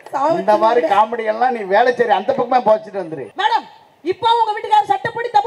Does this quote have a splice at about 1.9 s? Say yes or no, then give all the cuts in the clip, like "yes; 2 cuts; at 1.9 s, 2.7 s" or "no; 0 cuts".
no; 1 cut; at 3.2 s